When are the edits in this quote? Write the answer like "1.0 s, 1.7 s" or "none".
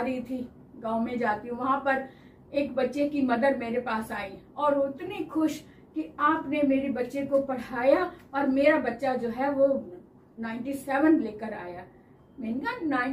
none